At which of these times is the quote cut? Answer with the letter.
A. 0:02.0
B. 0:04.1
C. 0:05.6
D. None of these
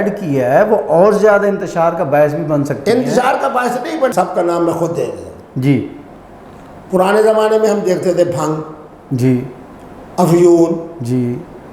B